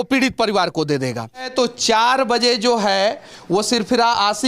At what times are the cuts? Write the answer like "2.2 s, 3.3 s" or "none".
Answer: 1.5 s

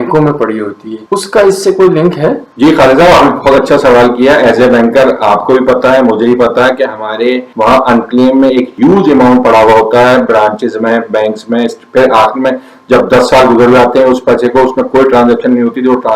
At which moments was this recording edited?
none

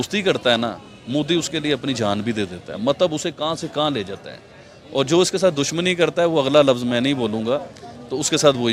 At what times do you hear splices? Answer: none

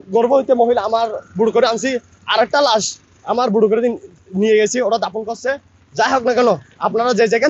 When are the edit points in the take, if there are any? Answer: none

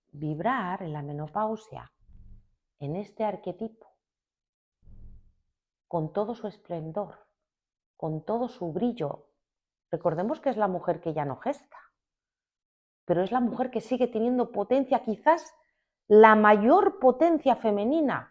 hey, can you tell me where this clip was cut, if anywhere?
none

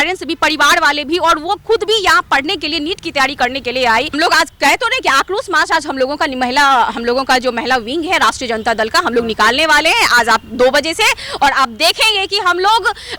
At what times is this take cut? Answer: 4.1 s

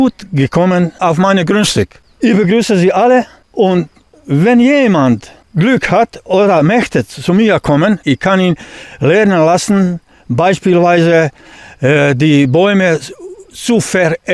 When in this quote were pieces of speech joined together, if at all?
1.0 s, 2.0 s, 3.4 s, 5.4 s, 8.0 s

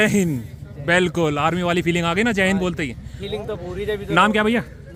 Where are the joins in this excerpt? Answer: none

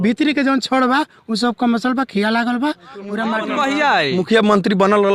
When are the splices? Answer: 3.4 s

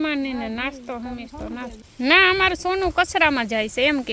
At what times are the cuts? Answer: 1.8 s

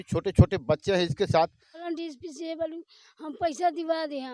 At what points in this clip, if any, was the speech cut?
1.8 s

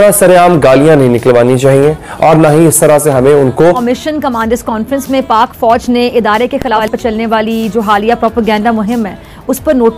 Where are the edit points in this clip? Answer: 3.9 s, 6.8 s

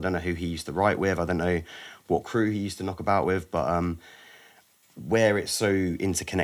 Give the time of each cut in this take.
none

